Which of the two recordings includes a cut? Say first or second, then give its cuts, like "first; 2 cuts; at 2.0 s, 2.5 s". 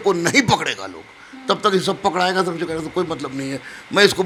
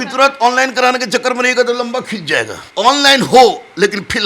second; 1 cut; at 2.6 s